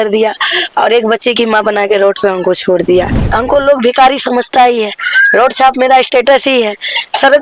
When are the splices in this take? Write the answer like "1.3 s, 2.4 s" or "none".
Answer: 3.2 s